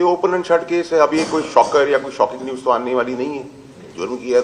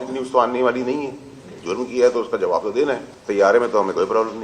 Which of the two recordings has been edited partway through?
second; 1 cut; at 3.1 s

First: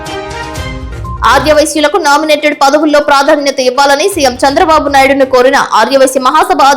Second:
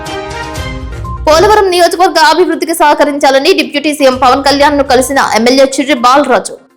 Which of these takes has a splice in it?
first; 1 cut; at 1.2 s

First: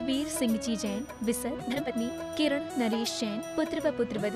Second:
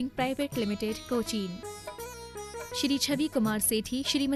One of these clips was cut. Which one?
first; 1 cut; at 1.8 s

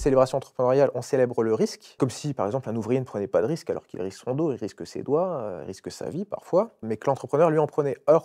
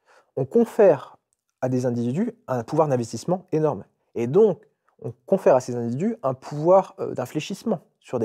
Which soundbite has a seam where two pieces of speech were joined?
first; 2 cuts; at 2.0 s, 6.9 s

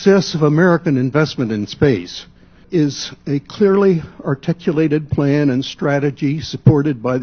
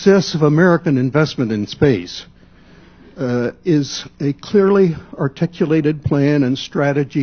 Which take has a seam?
first; 1 cut; at 2.6 s

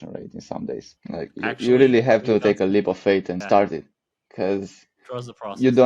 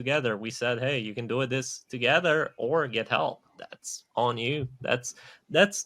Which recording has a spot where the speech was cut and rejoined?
first; 2 cuts; at 0.9 s, 3.4 s

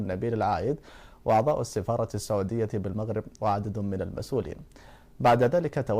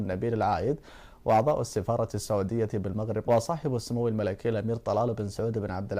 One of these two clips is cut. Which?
first; 1 cut; at 3.3 s

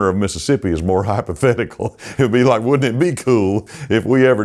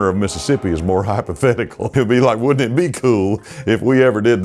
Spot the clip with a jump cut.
second; 1 cut; at 1.8 s

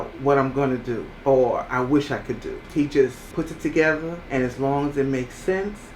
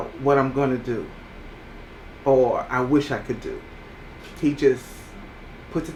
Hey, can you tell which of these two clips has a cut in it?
first; 4 cuts; at 1.1 s, 2.5 s, 3.2 s, 4.2 s

